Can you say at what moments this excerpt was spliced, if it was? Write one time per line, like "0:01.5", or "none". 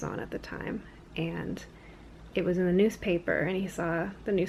none